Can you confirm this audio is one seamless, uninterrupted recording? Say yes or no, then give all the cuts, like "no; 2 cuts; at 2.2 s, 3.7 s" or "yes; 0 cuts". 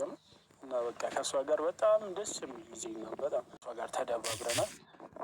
no; 1 cut; at 3.7 s